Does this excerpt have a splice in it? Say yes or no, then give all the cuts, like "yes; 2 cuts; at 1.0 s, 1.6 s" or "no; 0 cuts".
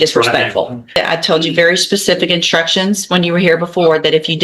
yes; 1 cut; at 1.0 s